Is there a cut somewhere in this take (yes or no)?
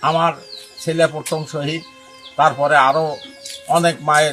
no